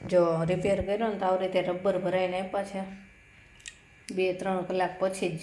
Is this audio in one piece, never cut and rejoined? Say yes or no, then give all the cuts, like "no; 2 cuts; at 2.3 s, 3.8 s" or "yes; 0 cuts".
yes; 0 cuts